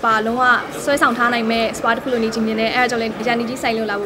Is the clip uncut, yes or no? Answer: no